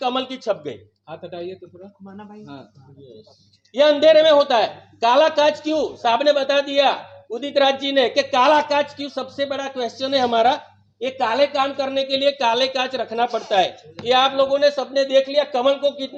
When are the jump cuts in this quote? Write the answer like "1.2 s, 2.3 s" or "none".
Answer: none